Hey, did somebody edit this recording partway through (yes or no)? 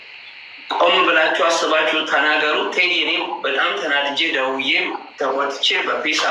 no